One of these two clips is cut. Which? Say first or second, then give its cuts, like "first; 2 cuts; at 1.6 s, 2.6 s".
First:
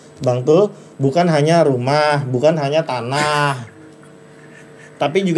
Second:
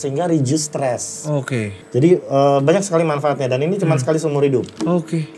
second; 1 cut; at 1.8 s